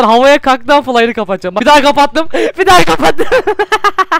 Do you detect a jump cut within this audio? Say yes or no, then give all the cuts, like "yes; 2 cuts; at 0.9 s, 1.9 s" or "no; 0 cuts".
yes; 1 cut; at 1.5 s